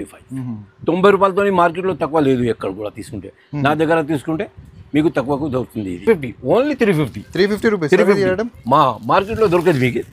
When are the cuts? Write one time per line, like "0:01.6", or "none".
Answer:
none